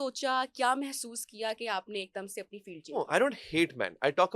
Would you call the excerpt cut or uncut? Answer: cut